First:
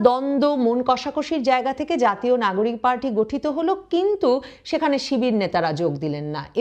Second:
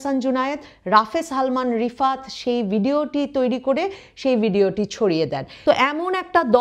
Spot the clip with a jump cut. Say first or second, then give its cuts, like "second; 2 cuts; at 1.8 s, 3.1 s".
second; 1 cut; at 5.4 s